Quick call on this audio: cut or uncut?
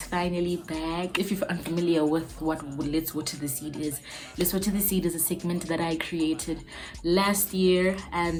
uncut